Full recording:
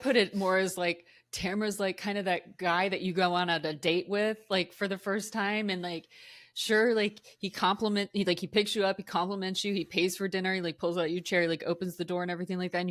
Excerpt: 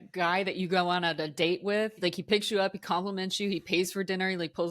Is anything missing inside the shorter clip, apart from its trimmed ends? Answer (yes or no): yes